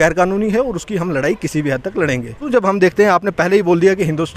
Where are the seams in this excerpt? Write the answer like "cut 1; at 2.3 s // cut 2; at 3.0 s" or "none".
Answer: cut 1; at 2.5 s